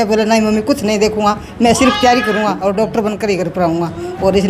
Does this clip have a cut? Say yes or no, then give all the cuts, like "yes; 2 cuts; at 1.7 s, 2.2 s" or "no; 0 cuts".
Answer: no; 0 cuts